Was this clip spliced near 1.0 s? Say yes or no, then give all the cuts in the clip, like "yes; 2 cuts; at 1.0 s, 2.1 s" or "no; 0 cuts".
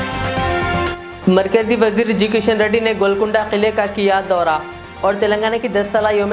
yes; 1 cut; at 1.0 s